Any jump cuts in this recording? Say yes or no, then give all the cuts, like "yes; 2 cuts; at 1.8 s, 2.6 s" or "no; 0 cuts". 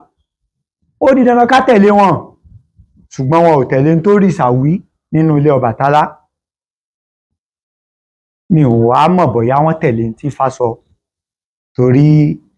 no; 0 cuts